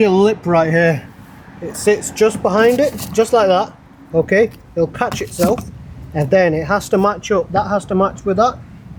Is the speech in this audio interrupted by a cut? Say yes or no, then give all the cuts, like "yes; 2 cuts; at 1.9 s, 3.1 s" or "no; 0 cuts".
no; 0 cuts